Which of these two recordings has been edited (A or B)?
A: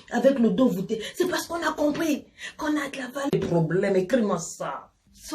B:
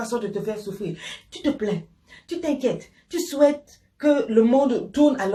A